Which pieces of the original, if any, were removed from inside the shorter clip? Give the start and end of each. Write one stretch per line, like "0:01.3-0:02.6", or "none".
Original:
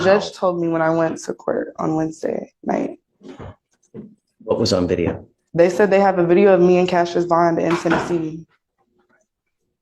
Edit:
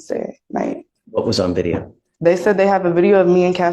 0:03.1-0:04.3